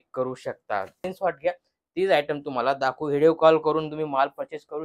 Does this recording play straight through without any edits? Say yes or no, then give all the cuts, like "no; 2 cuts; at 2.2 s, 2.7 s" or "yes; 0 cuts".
no; 1 cut; at 1.1 s